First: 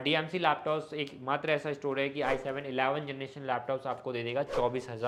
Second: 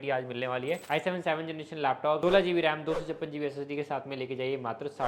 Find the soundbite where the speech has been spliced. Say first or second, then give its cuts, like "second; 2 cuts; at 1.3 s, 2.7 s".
second; 2 cuts; at 0.8 s, 2.2 s